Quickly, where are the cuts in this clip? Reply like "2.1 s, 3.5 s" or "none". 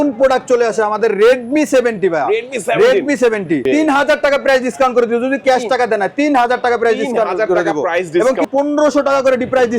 3.6 s, 8.4 s

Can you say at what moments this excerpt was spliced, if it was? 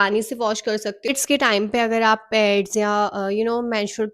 1.1 s

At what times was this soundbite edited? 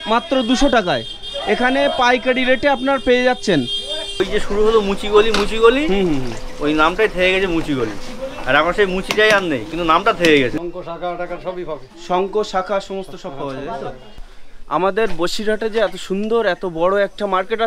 4.2 s, 10.5 s, 14.1 s

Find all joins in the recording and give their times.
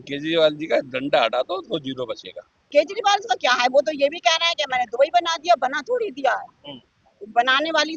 2.7 s

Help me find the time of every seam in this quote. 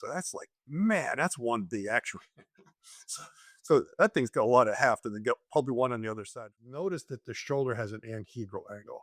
6.3 s

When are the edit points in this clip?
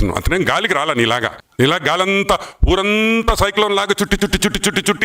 1.4 s

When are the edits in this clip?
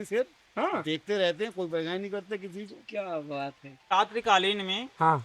3.9 s

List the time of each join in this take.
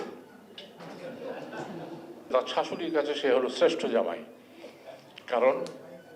2.3 s

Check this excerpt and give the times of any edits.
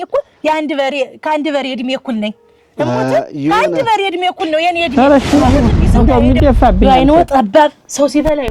4.9 s

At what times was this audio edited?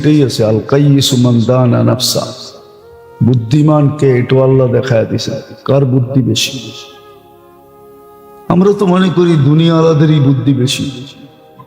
7.0 s, 8.5 s

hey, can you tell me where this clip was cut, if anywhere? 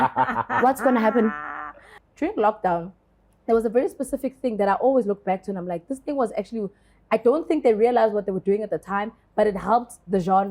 1.9 s

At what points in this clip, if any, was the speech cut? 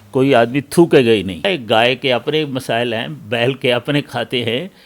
1.5 s

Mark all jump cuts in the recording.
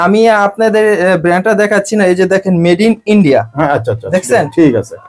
none

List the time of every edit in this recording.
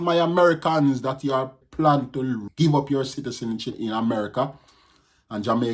1.9 s

